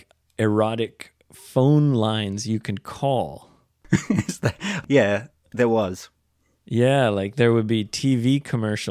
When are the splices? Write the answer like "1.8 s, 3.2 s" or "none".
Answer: 3.9 s